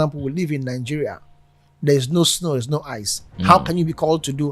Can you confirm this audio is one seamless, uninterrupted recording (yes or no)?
yes